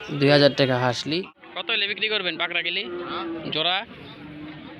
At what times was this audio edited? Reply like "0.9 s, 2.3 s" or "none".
1.4 s